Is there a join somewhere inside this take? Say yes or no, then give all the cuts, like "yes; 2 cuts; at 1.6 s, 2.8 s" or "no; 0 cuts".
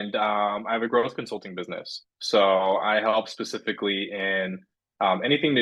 no; 0 cuts